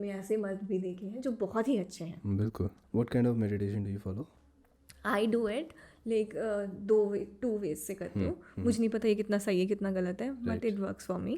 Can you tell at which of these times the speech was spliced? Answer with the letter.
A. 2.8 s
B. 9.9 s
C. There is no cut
A